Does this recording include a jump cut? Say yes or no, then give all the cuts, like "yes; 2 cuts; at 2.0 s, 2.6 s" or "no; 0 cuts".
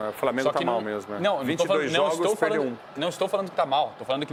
no; 0 cuts